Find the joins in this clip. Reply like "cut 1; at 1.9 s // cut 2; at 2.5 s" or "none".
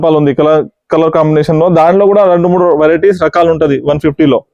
none